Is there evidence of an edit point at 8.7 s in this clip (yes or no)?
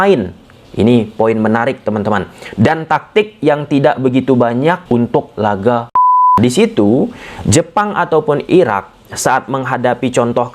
no